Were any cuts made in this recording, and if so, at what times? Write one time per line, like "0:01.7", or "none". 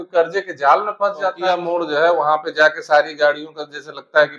0:01.5